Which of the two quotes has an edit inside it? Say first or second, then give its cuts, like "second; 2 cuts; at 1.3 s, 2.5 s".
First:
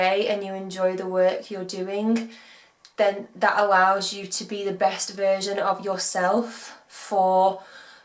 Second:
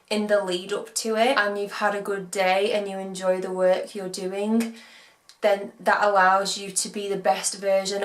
second; 1 cut; at 1.4 s